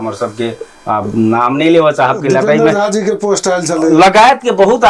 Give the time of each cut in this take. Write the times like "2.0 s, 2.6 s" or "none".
none

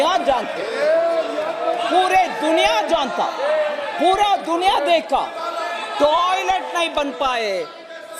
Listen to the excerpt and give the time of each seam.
none

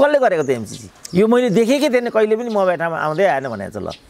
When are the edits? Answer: 1.0 s

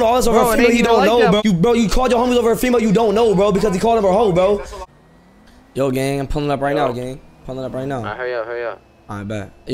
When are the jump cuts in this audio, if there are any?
1.4 s, 4.8 s

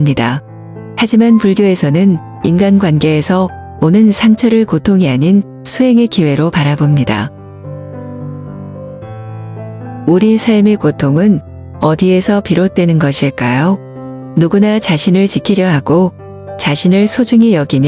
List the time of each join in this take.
7.4 s, 10.0 s

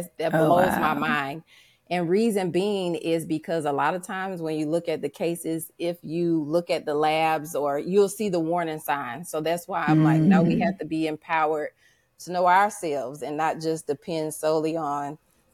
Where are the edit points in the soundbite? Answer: none

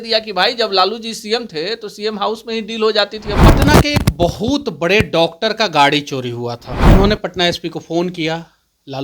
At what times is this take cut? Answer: 3.3 s, 6.7 s

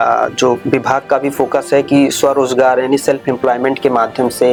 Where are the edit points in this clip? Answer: none

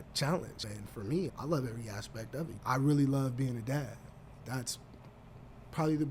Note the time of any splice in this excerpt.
2.5 s, 4.4 s

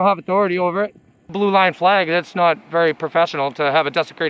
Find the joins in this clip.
1.3 s

